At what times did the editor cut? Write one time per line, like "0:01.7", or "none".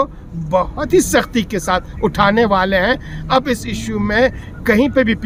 none